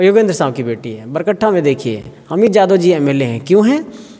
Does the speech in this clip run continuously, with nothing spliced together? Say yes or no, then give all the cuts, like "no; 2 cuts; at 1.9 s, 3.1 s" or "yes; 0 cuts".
yes; 0 cuts